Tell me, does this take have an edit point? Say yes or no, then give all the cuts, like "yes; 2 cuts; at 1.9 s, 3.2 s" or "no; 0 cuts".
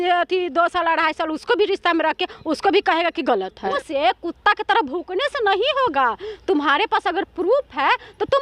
yes; 1 cut; at 3.7 s